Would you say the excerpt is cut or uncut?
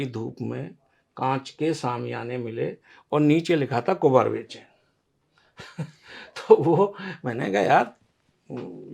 uncut